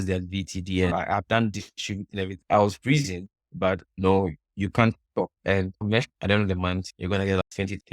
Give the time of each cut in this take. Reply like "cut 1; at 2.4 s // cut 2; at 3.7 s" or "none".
cut 1; at 0.9 s // cut 2; at 2.4 s // cut 3; at 6.1 s